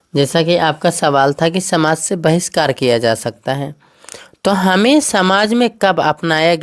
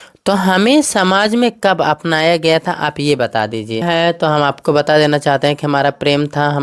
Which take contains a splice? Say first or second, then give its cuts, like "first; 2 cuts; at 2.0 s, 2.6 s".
second; 1 cut; at 3.8 s